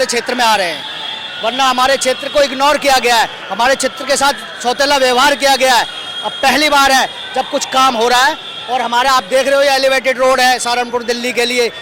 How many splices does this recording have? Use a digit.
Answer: 0